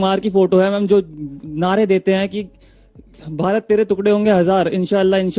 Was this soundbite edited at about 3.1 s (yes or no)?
no